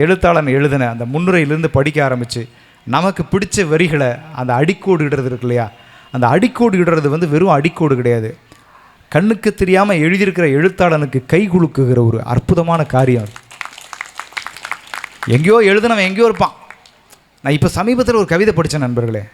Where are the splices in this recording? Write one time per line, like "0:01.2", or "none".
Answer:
none